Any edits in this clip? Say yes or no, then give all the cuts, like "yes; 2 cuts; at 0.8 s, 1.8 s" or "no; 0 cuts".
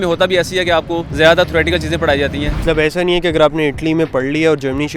yes; 1 cut; at 2.6 s